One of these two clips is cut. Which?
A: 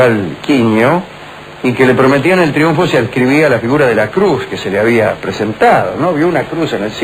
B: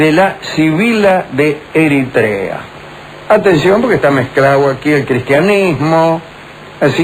A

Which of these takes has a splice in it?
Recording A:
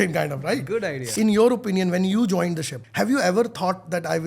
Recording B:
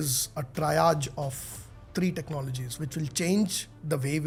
A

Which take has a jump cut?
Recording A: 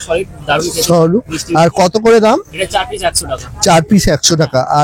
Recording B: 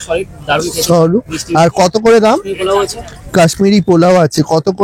B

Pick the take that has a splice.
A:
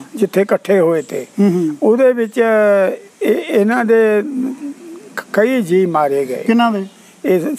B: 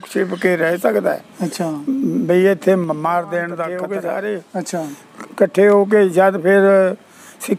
B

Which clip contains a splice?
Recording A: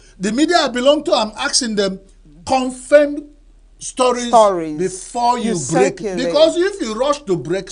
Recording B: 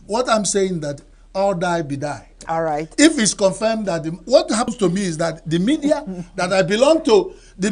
B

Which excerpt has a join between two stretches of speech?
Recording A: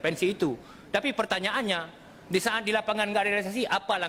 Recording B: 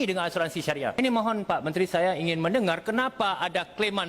B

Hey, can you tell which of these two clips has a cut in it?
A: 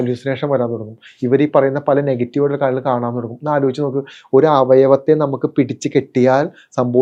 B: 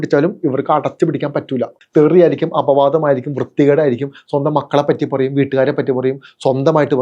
B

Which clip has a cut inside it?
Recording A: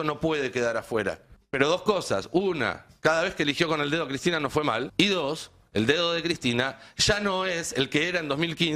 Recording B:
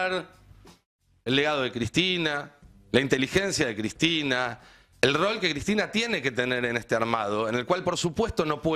A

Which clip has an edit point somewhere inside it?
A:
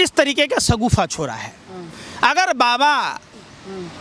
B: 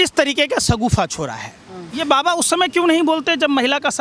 B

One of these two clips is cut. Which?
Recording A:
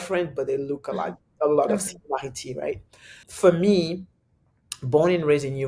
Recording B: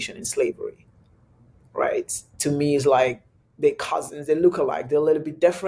A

